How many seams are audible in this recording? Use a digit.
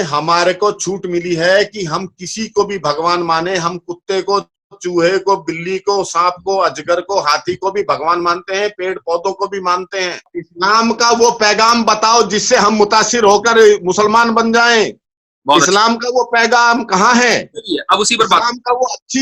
1